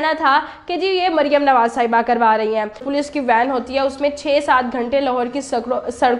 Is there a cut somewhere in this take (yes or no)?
yes